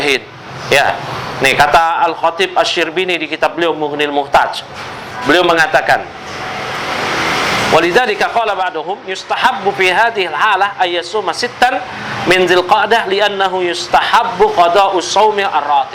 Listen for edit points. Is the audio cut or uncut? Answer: uncut